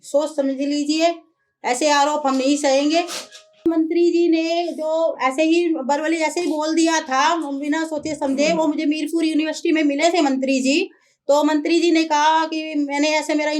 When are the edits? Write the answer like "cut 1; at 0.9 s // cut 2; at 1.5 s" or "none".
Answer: cut 1; at 3.6 s